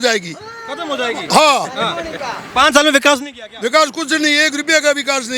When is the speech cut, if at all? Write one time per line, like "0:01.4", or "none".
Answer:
none